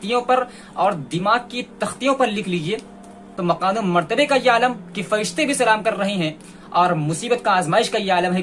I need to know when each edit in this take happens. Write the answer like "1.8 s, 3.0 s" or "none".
3.3 s